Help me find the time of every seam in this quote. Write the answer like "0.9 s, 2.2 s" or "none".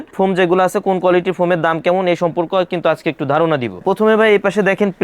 3.8 s